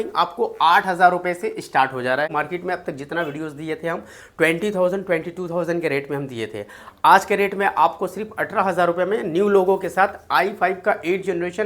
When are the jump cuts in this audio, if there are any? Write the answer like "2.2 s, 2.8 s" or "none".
2.3 s

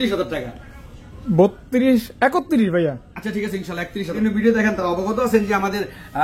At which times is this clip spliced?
4.1 s

